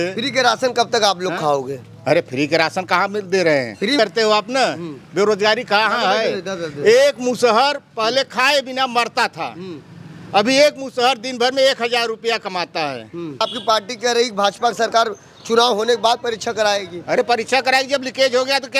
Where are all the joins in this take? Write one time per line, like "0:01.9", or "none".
0:04.0
0:13.4